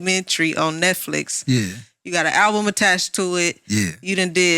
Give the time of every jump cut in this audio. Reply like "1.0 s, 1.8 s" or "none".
none